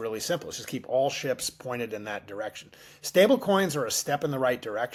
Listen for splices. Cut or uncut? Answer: uncut